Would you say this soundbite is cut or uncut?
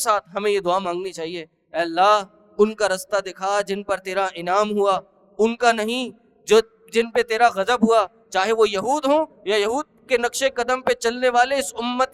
uncut